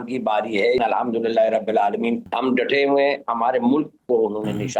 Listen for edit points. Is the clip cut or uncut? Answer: cut